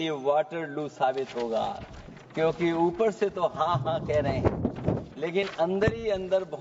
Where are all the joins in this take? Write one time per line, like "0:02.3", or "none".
none

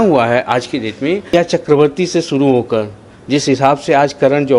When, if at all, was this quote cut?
0:01.3

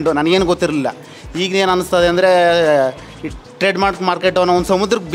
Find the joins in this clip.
none

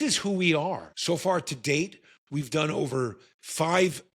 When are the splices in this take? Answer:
0:00.9

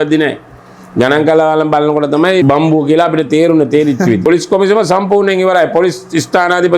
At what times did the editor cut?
0:02.4
0:04.2

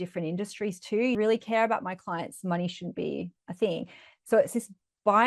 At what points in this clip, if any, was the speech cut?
0:01.2

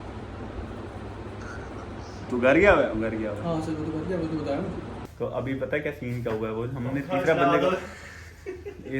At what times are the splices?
0:04.9

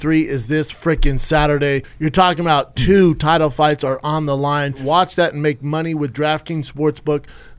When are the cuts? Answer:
0:01.9
0:04.8

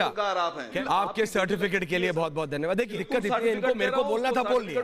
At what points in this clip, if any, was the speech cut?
0:00.8
0:03.0

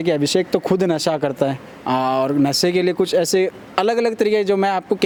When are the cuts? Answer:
none

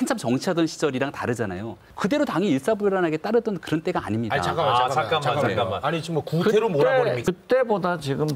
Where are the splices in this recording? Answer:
0:01.8
0:07.2

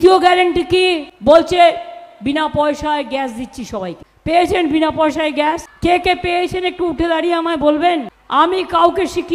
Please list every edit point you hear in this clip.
0:01.1
0:04.1
0:05.7
0:08.2

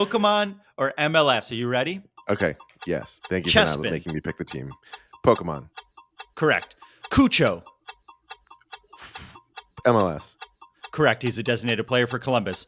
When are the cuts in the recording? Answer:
none

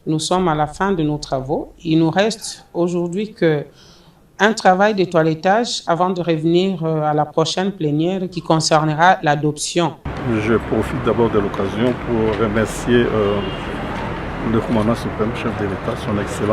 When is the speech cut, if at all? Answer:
0:10.1

